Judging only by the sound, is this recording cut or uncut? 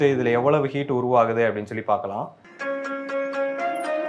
uncut